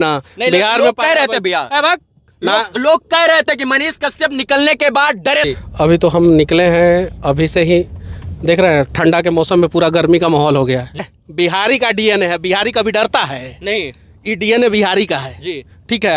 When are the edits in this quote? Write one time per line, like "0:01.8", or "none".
0:05.5
0:11.0